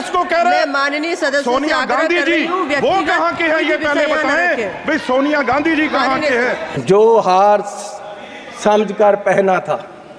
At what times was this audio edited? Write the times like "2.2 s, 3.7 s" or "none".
6.7 s

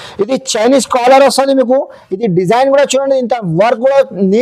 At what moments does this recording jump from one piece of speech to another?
none

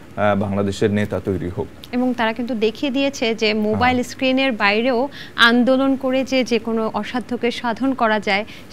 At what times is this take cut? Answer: none

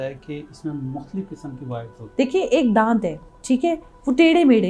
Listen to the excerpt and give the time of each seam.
2.0 s

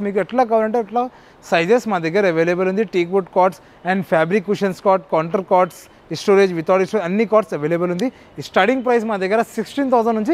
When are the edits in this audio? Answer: none

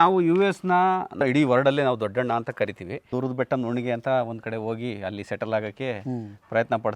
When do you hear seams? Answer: 1.1 s, 3.1 s

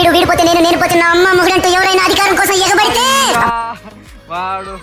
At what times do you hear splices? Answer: none

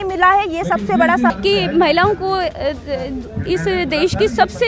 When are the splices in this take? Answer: 1.3 s

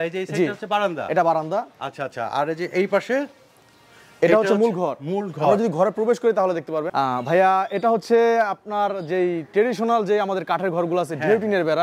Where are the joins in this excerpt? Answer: 6.9 s

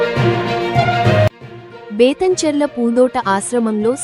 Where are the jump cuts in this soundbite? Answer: 1.3 s

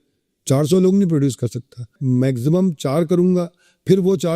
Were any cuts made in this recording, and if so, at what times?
1.9 s

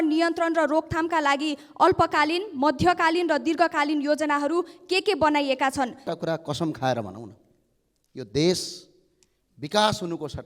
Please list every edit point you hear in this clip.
6.1 s

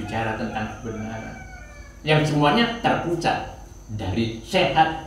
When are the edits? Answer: none

